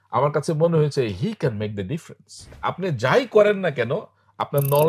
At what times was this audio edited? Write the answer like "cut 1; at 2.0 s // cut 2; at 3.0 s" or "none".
cut 1; at 2.5 s

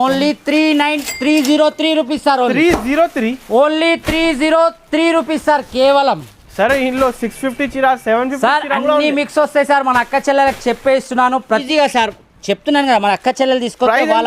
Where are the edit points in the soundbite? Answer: cut 1; at 11.6 s

